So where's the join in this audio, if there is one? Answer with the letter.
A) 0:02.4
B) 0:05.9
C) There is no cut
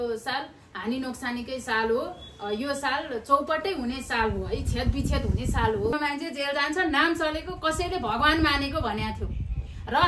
B